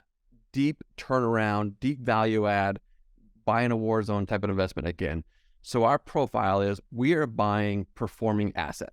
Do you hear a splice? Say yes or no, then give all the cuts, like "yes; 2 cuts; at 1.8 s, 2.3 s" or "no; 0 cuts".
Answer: yes; 1 cut; at 4.3 s